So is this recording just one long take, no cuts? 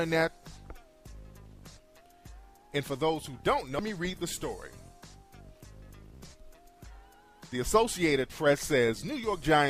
yes; 0 cuts

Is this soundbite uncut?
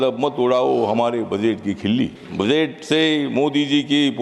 no; 1 cut; at 2.2 s

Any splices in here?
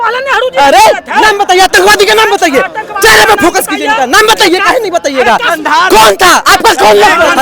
no; 0 cuts

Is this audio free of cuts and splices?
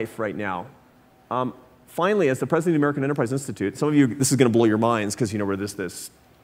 yes; 0 cuts

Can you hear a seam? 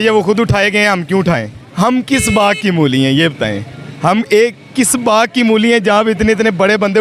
yes; 1 cut; at 1.6 s

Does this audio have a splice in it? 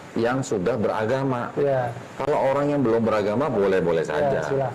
yes; 1 cut; at 2.0 s

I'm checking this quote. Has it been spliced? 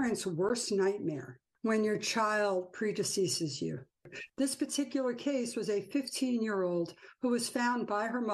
no; 0 cuts

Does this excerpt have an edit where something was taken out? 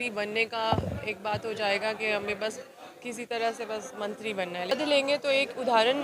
yes; 1 cut; at 4.7 s

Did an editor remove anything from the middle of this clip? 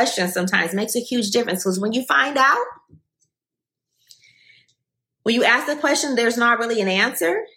no; 0 cuts

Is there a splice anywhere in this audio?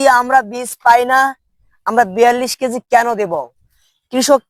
no; 0 cuts

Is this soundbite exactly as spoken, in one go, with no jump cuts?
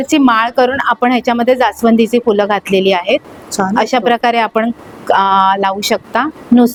yes; 0 cuts

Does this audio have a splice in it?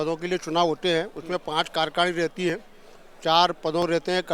no; 0 cuts

